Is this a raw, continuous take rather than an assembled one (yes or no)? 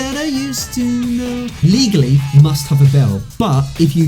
no